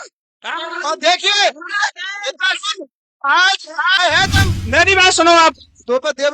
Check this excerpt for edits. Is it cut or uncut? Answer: cut